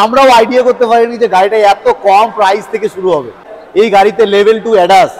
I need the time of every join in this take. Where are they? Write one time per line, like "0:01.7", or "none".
0:03.5